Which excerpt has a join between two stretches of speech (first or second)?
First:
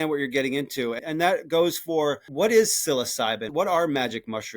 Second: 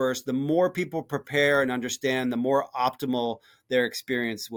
first